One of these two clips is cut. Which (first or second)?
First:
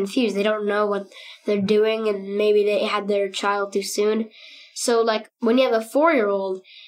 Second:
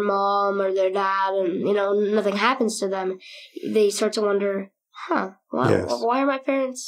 first